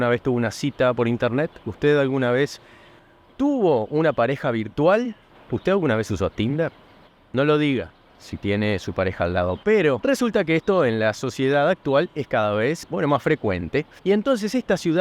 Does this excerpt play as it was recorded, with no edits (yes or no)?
no